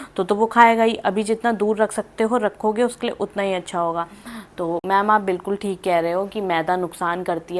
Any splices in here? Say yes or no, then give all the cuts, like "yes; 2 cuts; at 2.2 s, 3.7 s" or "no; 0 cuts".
no; 0 cuts